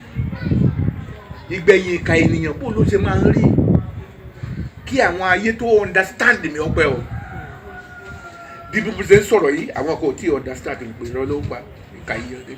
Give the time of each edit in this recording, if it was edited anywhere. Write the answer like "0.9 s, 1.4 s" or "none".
none